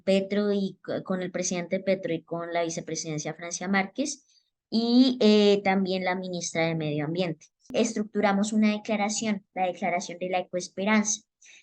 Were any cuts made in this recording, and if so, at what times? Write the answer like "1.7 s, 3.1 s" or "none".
7.7 s